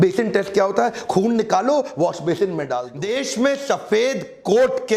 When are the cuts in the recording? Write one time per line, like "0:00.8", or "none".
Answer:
0:02.9